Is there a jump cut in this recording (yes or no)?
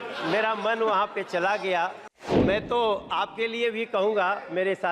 yes